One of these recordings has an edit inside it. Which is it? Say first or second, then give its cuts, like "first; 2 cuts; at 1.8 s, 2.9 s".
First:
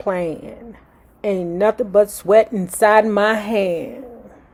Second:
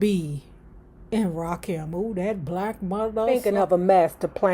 second; 1 cut; at 3.3 s